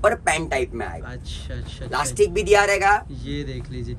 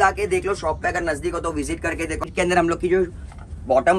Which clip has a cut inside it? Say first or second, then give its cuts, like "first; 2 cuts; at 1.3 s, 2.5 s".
second; 1 cut; at 2.2 s